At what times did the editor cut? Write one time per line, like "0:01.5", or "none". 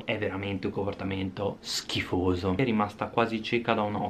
0:02.6